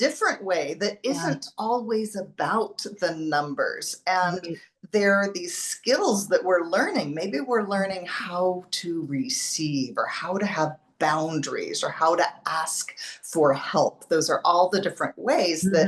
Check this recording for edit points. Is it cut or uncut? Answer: uncut